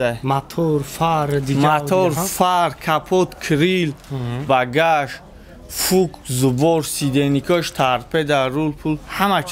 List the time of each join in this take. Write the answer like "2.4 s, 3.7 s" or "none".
none